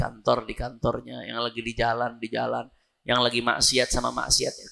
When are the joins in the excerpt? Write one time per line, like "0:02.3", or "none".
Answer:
none